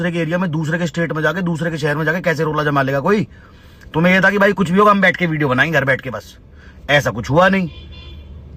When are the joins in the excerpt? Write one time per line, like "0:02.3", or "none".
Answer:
none